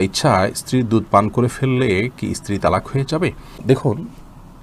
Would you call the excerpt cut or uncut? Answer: uncut